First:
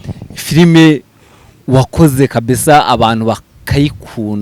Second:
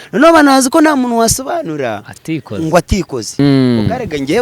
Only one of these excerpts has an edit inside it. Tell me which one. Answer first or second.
second